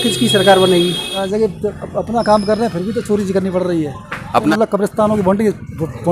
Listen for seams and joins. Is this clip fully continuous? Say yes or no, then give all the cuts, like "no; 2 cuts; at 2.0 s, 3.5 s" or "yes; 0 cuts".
no; 2 cuts; at 1.2 s, 4.4 s